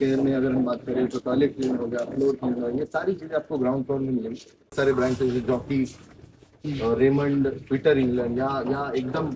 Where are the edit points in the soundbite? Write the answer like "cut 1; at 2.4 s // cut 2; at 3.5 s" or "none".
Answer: cut 1; at 4.7 s